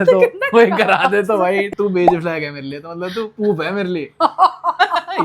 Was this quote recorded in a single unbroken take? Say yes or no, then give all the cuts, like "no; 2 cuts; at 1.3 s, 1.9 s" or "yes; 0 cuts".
no; 1 cut; at 1.7 s